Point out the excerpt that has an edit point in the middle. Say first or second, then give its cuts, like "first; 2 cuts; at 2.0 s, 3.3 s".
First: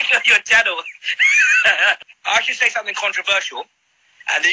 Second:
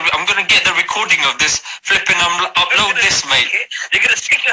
first; 1 cut; at 2.0 s